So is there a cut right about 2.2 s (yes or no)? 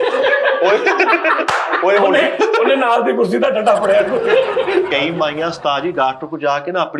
no